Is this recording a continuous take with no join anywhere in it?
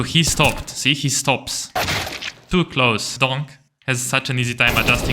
no; 1 cut; at 3.1 s

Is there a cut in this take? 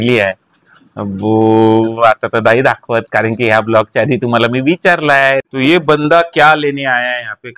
yes; 1 cut; at 5.5 s

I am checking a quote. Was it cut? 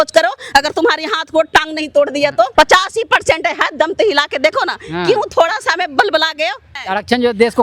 yes; 2 cuts; at 2.5 s, 6.7 s

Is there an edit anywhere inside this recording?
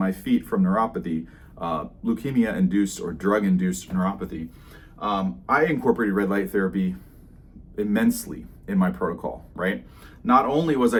no; 0 cuts

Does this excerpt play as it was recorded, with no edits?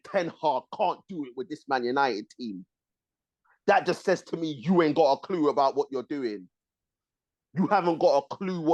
yes; 0 cuts

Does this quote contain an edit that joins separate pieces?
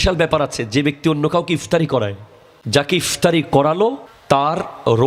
yes; 2 cuts; at 1.9 s, 4.1 s

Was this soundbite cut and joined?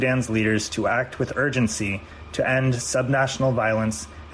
no; 0 cuts

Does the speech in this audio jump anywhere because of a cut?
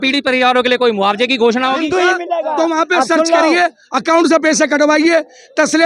yes; 1 cut; at 1.8 s

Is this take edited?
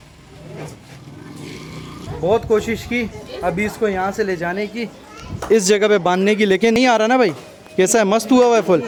no; 0 cuts

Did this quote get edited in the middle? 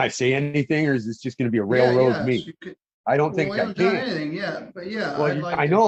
no; 0 cuts

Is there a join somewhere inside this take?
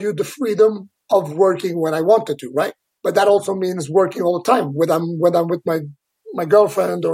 no; 0 cuts

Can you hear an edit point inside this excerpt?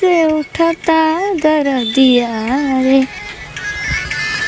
no; 0 cuts

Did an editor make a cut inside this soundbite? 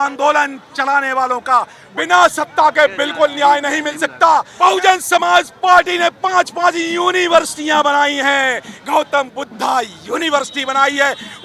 yes; 2 cuts; at 1.8 s, 4.5 s

